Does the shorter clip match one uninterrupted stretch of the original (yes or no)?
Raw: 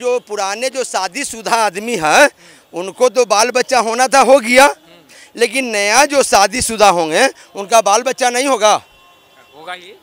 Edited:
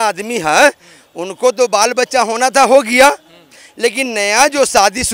yes